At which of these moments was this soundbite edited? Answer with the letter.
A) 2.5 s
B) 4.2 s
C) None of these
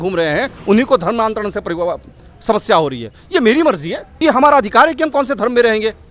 B